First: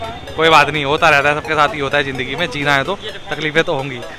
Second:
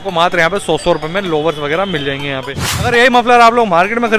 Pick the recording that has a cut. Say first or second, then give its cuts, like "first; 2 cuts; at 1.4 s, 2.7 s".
second; 1 cut; at 2.9 s